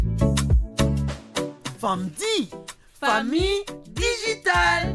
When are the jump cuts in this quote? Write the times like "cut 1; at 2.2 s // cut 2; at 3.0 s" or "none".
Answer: cut 1; at 1.0 s